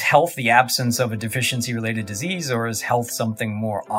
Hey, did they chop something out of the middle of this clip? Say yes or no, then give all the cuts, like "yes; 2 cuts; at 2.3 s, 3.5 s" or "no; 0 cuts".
no; 0 cuts